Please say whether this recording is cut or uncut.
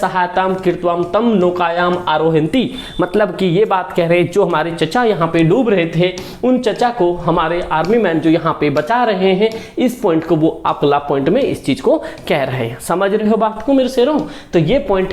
uncut